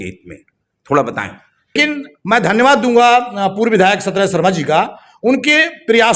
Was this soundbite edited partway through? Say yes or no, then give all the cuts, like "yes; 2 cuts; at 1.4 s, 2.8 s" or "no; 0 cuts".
yes; 1 cut; at 1.7 s